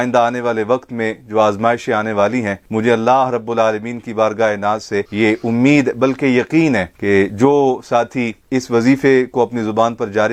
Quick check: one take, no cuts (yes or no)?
yes